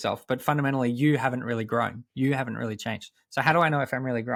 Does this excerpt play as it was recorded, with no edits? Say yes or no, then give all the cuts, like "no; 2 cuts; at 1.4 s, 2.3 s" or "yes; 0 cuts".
yes; 0 cuts